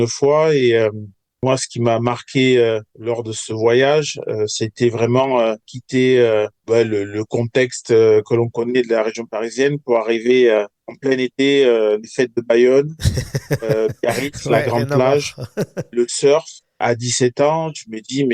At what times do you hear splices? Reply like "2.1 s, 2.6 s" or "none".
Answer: 5.7 s, 6.6 s